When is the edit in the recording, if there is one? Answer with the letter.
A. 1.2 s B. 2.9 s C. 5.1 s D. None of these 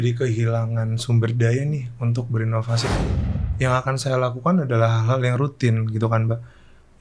B